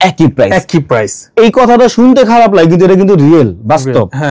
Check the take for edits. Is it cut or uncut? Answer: uncut